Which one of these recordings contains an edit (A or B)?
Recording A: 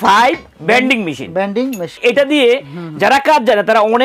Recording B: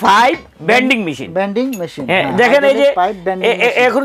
A